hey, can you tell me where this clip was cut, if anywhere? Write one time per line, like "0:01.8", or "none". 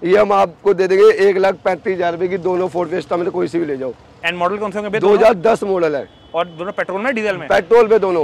none